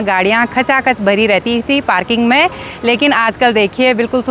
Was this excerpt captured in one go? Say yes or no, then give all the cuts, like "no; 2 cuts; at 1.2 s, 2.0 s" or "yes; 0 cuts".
yes; 0 cuts